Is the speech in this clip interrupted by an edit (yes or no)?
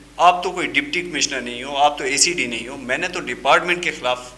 no